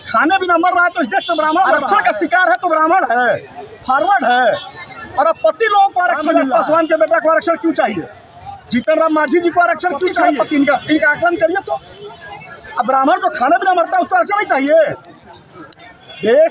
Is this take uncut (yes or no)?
no